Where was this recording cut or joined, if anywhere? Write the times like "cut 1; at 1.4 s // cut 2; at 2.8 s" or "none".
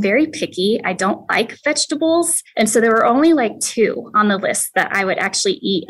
cut 1; at 2.4 s